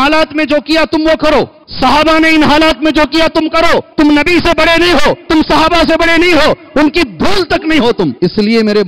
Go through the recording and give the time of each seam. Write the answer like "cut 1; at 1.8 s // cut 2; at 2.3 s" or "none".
cut 1; at 1.6 s // cut 2; at 3.9 s // cut 3; at 5.2 s // cut 4; at 8.1 s